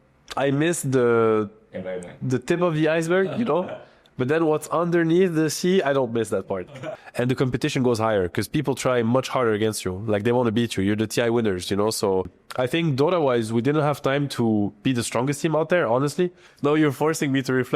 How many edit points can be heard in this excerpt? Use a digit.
3